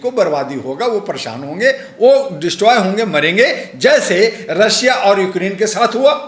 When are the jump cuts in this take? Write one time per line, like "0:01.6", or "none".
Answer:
none